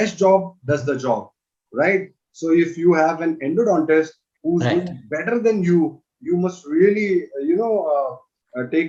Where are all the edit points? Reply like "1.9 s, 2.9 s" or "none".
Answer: none